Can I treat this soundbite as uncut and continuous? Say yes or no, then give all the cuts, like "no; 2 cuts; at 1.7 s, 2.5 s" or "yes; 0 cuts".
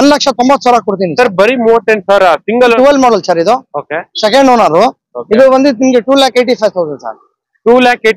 no; 1 cut; at 2.8 s